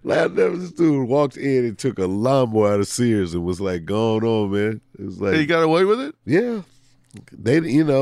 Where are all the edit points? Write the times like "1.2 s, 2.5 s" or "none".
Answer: none

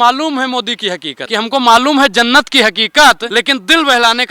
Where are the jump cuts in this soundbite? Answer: 1.1 s, 3.2 s

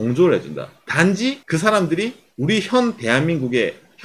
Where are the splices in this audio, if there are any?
1.4 s

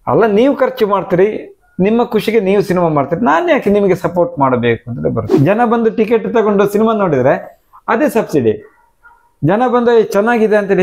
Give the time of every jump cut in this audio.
5.3 s

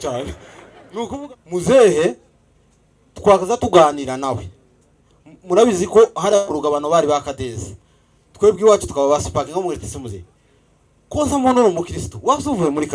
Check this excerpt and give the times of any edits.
1.1 s

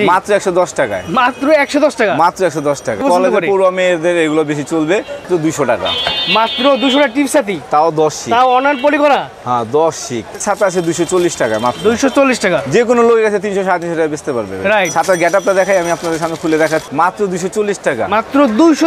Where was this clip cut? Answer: 3.0 s, 5.3 s, 10.3 s, 16.9 s

